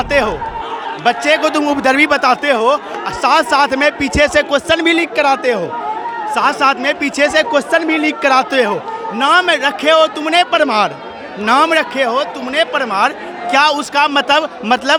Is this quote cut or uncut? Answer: uncut